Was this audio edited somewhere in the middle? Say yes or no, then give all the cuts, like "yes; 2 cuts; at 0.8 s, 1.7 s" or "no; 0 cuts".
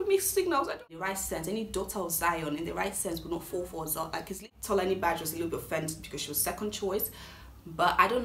yes; 2 cuts; at 1.0 s, 4.5 s